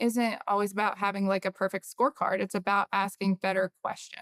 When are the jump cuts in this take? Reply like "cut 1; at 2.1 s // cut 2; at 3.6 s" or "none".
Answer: none